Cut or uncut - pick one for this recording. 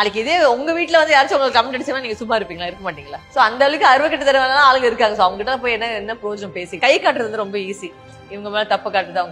cut